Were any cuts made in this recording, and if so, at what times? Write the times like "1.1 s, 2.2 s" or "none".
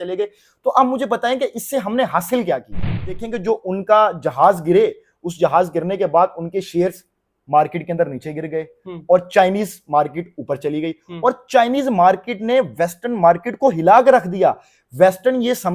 3.2 s